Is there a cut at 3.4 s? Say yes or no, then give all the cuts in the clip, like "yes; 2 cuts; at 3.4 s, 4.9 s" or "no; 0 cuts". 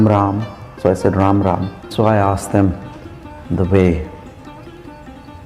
no; 1 cut; at 1.9 s